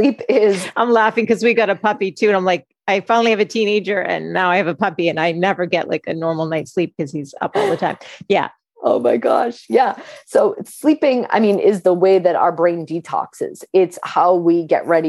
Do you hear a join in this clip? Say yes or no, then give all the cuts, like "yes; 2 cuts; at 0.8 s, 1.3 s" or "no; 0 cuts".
no; 0 cuts